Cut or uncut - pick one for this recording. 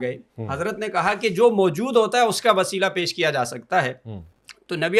uncut